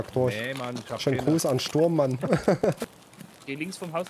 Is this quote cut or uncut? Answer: cut